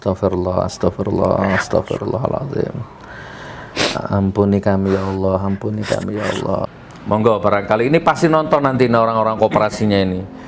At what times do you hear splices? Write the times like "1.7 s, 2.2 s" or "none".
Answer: 6.7 s